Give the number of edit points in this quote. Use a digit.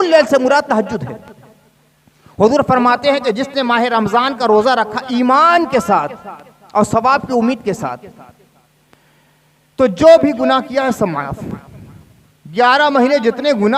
0